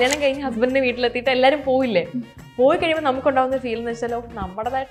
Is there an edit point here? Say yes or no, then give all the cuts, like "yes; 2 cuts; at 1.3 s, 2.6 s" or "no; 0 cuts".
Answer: no; 0 cuts